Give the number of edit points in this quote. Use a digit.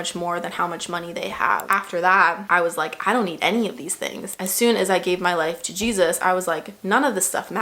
2